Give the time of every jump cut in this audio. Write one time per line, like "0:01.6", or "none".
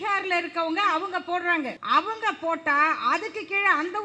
0:01.8